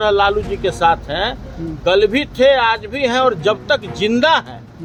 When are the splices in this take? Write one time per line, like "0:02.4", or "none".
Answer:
none